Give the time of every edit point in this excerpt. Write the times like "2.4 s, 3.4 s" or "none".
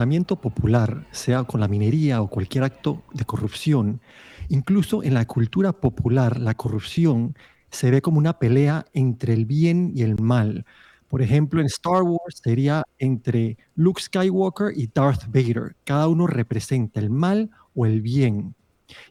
none